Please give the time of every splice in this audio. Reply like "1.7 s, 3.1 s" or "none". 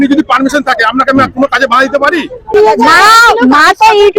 2.5 s

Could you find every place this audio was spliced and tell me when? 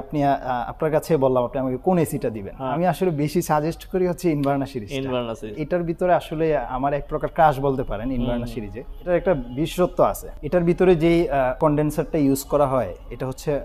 2.6 s, 5.6 s, 9.1 s, 10.3 s

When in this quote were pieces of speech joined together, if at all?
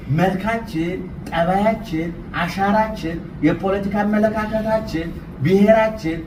none

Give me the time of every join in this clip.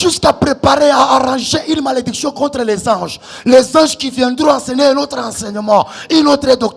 none

